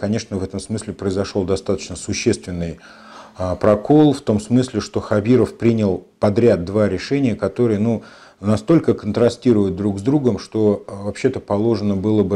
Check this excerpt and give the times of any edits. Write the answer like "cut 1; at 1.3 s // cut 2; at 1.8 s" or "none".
none